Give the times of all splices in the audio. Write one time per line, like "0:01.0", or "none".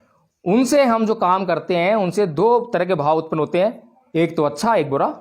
none